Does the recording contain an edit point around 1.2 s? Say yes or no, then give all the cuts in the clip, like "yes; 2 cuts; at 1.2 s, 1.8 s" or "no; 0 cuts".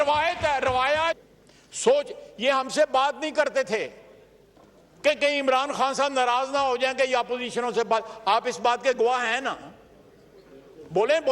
yes; 1 cut; at 1.2 s